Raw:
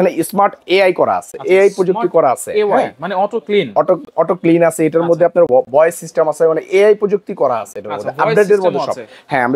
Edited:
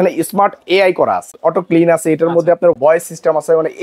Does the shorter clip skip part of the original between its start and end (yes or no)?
yes